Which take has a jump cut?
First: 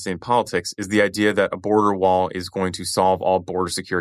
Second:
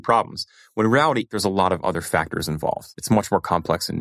second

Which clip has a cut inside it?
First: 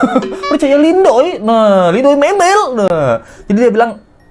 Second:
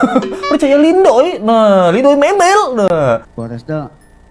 second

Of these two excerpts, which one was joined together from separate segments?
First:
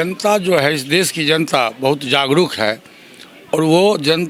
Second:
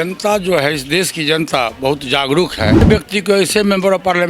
second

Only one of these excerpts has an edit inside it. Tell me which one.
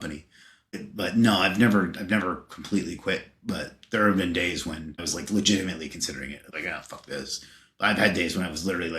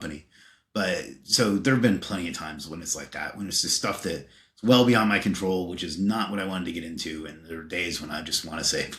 first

